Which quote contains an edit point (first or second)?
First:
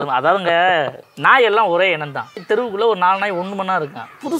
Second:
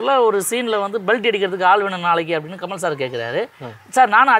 first